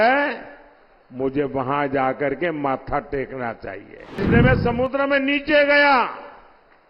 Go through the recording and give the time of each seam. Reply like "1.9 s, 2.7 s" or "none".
4.2 s